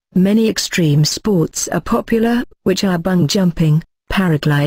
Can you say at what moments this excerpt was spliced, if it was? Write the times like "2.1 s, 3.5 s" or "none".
3.2 s

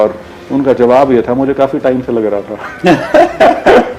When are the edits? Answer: none

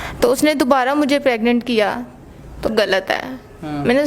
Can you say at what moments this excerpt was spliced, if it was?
2.7 s

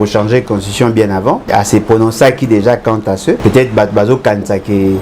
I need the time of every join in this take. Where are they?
1.4 s, 3.4 s

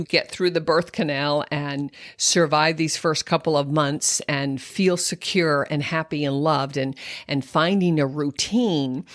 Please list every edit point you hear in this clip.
none

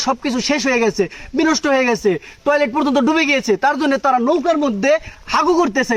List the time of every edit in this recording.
none

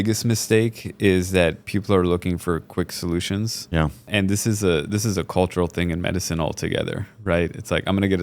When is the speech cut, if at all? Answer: none

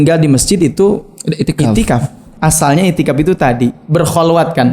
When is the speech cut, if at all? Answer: 2.3 s

